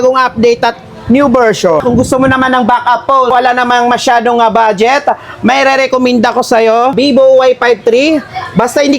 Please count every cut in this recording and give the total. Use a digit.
3